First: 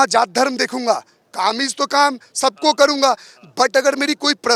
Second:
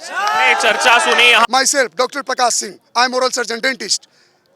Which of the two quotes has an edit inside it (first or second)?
second